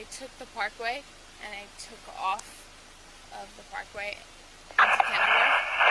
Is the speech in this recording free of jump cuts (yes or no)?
yes